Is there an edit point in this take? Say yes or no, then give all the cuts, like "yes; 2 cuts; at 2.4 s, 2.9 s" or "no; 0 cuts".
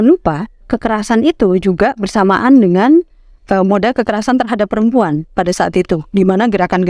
no; 0 cuts